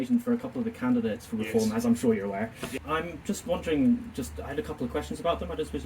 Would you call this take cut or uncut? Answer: cut